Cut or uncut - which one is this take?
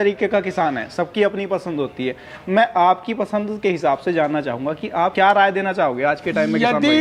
uncut